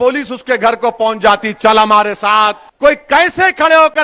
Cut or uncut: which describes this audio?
cut